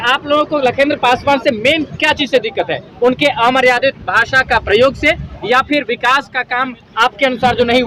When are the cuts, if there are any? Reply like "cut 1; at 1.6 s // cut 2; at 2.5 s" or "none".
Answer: none